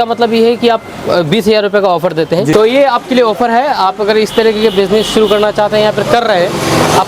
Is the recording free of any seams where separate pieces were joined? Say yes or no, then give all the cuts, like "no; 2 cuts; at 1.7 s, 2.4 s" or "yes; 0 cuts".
no; 1 cut; at 2.5 s